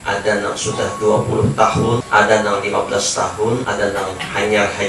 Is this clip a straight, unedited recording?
no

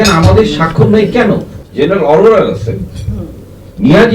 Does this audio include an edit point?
yes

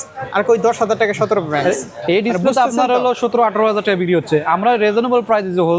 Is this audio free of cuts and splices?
yes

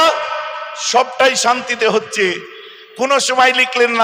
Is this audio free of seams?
yes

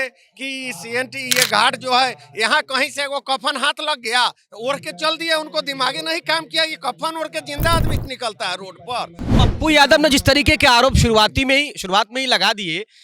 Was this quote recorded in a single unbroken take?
no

